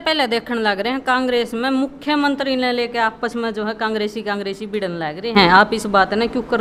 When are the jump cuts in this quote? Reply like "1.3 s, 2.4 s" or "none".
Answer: none